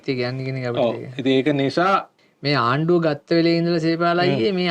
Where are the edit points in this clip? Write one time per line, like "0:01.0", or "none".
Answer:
0:02.2